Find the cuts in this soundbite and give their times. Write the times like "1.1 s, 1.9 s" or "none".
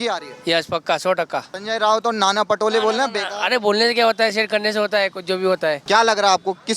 1.5 s, 5.8 s